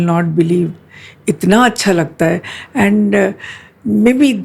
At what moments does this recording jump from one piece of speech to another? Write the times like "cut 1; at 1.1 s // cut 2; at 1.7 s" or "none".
none